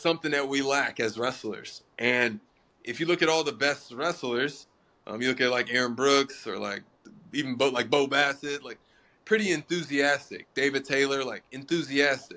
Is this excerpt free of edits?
yes; 0 cuts

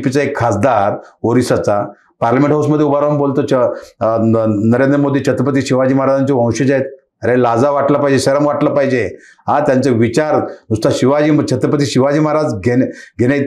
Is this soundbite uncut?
yes; 0 cuts

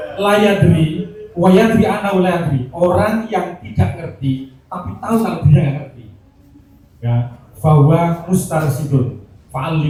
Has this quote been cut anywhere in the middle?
no; 0 cuts

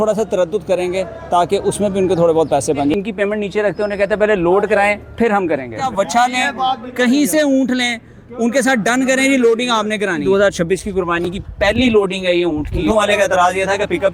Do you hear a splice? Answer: yes; 4 cuts; at 2.9 s, 5.9 s, 10.2 s, 12.8 s

